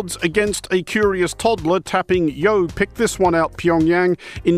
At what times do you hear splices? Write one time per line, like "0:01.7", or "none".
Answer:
0:02.4